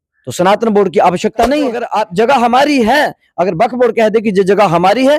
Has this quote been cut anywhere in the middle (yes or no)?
yes